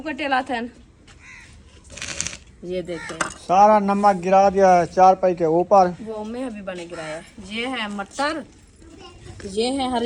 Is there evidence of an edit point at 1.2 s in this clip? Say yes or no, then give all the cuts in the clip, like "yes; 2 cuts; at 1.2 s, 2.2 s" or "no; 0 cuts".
no; 1 cut; at 6.2 s